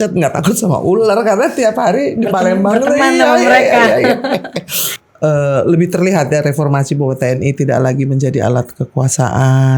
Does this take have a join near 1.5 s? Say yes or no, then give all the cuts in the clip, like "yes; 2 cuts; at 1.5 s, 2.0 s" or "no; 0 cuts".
no; 1 cut; at 4.9 s